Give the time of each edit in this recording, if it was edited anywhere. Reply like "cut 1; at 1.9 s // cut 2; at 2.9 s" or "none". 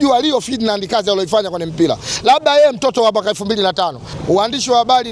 cut 1; at 4.1 s